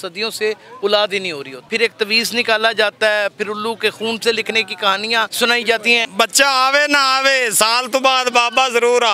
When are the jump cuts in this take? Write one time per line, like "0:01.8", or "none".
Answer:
0:01.7
0:05.3
0:06.1